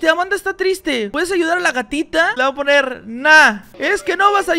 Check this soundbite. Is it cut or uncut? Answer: cut